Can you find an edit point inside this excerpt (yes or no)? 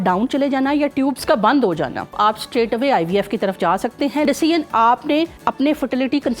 yes